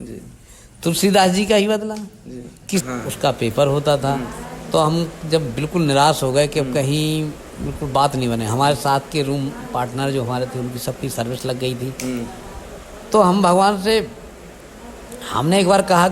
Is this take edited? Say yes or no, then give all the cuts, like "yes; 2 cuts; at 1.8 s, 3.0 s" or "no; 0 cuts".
yes; 1 cut; at 2.8 s